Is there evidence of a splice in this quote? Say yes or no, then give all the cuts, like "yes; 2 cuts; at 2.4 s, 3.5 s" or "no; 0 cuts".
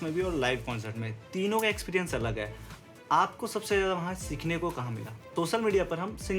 yes; 1 cut; at 5.2 s